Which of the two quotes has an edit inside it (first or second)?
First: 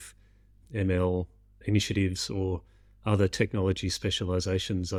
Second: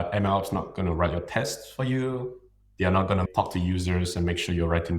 second